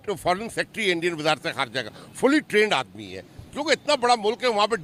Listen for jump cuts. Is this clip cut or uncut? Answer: uncut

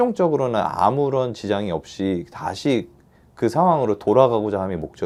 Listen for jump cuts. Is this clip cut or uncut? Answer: uncut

